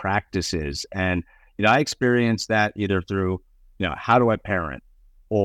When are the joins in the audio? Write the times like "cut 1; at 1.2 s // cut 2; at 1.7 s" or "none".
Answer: none